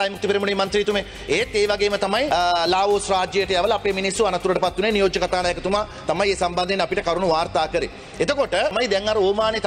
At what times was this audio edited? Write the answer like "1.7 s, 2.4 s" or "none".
8.7 s